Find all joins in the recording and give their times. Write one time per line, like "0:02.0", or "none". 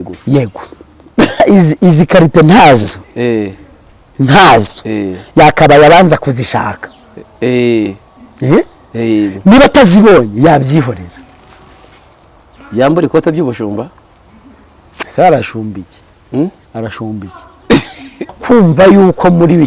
0:01.4
0:18.3